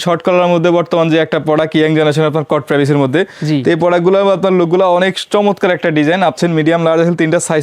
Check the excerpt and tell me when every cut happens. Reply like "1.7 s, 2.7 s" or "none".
6.4 s